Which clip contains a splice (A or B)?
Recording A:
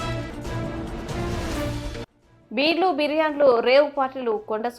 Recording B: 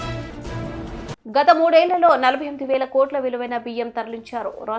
A